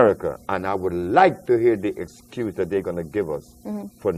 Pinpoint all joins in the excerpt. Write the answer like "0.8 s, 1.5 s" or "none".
none